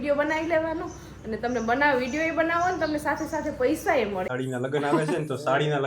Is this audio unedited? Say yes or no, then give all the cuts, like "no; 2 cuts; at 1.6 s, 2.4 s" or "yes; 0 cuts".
no; 1 cut; at 4.3 s